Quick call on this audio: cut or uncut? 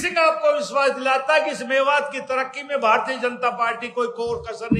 uncut